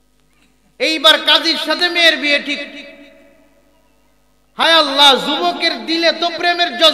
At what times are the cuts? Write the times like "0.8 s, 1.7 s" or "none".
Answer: none